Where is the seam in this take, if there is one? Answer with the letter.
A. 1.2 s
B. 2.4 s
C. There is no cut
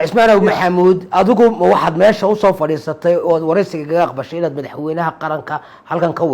C